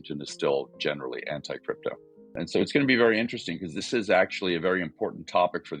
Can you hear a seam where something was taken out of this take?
no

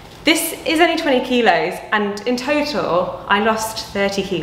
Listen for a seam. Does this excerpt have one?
no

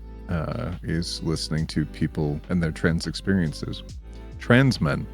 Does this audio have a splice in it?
yes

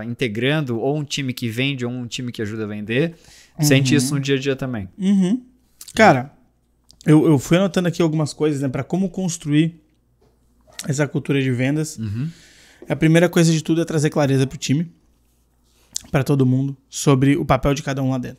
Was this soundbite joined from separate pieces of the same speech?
no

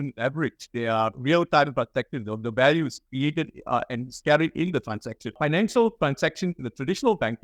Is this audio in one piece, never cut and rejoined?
no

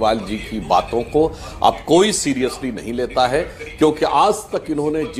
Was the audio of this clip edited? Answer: no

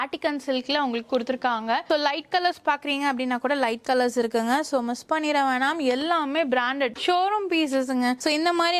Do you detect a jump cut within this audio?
no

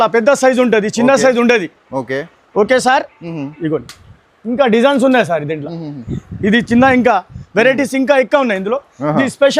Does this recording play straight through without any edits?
yes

